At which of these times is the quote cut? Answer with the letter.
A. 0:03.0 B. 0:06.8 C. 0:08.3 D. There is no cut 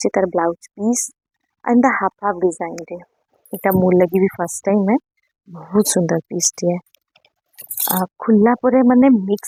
D